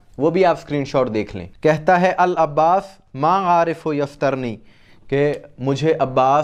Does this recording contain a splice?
no; 0 cuts

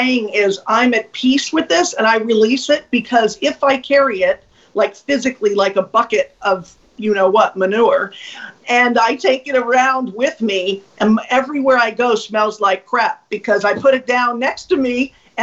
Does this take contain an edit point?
no; 0 cuts

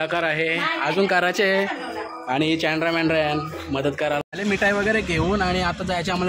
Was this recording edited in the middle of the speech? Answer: yes; 1 cut; at 4.2 s

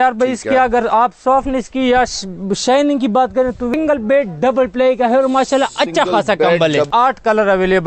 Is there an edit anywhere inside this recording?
yes; 2 cuts; at 3.7 s, 6.9 s

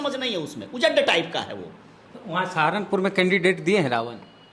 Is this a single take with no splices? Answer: yes; 0 cuts

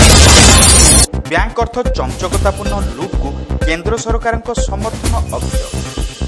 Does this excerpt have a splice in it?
yes; 1 cut; at 1.0 s

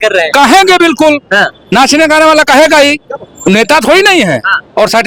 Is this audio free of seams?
yes; 0 cuts

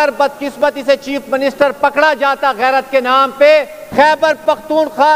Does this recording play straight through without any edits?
no; 1 cut; at 3.8 s

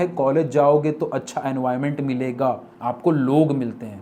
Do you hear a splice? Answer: yes; 1 cut; at 2.7 s

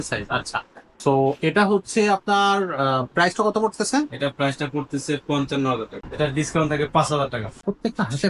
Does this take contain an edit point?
yes; 2 cuts; at 6.0 s, 7.4 s

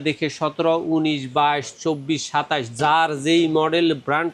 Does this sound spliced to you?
no; 0 cuts

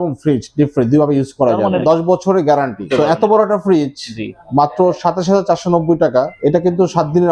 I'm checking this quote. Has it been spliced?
yes; 3 cuts; at 1.8 s, 2.8 s, 6.3 s

